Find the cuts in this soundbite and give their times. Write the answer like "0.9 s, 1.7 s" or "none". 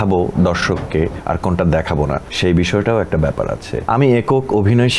1.2 s, 2.3 s, 3.7 s